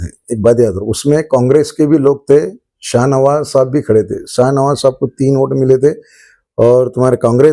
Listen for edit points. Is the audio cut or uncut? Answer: uncut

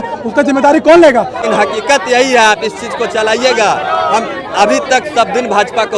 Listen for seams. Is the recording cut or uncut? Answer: cut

